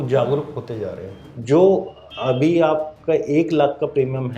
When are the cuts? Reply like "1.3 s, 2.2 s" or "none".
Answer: 1.4 s